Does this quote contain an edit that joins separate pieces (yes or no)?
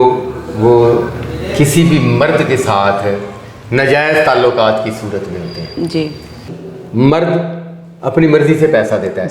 yes